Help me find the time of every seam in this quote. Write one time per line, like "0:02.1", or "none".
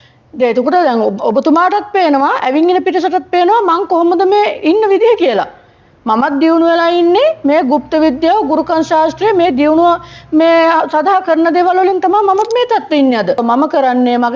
0:13.4